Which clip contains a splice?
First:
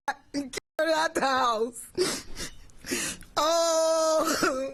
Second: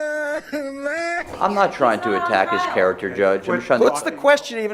second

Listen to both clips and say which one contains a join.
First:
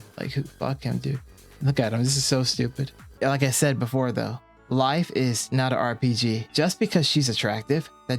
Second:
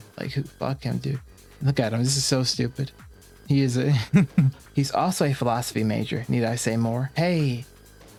first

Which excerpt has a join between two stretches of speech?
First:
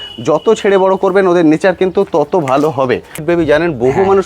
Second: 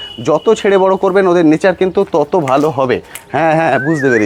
first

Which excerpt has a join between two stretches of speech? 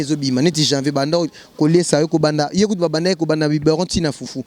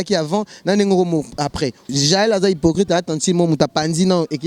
second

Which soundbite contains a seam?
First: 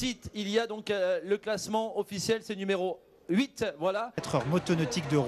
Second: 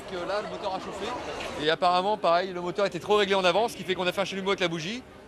first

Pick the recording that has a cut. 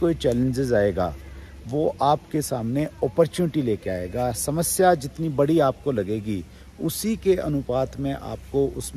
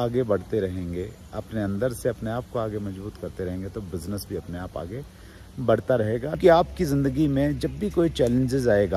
second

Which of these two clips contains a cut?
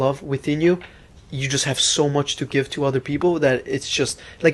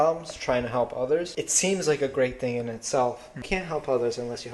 second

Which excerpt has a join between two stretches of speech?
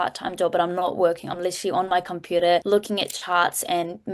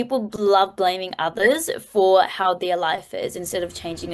first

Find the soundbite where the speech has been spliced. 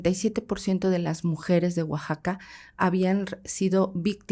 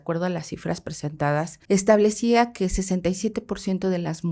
second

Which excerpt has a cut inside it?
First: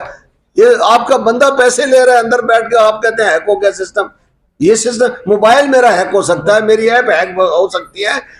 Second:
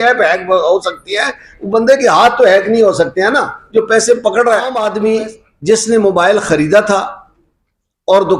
second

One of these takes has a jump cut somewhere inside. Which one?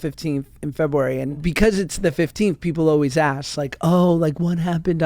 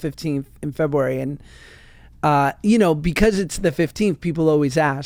first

